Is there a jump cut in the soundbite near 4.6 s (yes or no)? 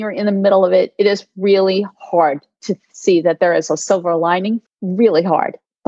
yes